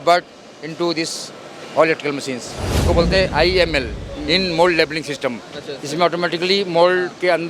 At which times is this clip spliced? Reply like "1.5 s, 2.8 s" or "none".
2.7 s